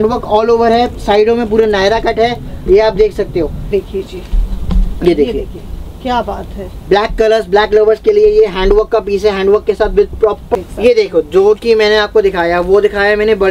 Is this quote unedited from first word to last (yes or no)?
no